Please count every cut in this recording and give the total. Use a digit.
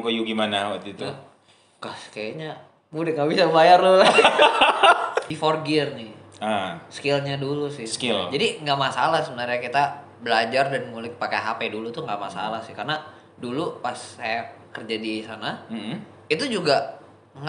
1